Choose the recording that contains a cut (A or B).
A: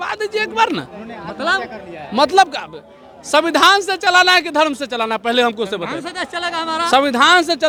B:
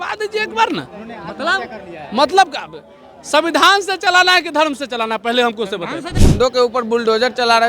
B